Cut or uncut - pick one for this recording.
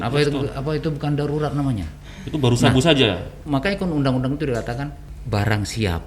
cut